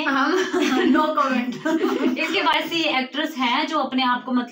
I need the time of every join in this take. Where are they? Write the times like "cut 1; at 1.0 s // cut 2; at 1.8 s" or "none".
cut 1; at 2.5 s